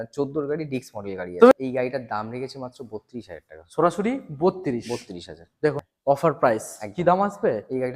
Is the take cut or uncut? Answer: cut